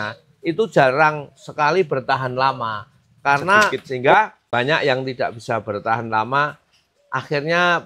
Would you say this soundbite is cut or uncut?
cut